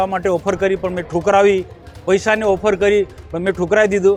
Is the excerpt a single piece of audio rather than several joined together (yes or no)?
yes